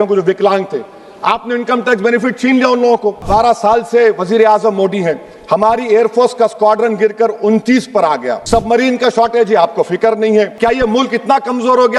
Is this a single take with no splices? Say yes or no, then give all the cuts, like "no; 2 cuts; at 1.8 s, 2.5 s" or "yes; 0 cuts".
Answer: no; 3 cuts; at 3.3 s, 8.3 s, 10.5 s